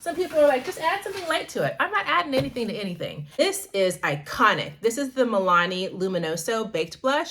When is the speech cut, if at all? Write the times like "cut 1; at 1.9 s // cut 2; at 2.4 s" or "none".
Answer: cut 1; at 3.4 s